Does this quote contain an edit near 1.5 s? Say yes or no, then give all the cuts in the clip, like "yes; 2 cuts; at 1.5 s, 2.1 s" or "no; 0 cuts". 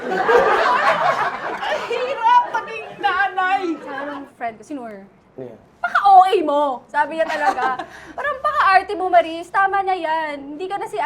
no; 1 cut; at 3.9 s